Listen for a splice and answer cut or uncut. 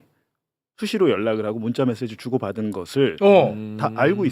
uncut